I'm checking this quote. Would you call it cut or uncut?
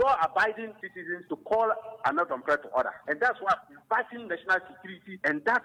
uncut